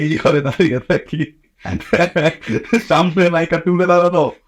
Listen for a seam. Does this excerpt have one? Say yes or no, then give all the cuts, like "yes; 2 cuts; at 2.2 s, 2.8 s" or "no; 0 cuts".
no; 0 cuts